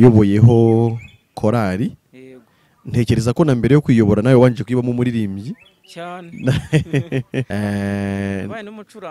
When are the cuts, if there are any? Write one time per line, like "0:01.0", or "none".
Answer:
0:07.5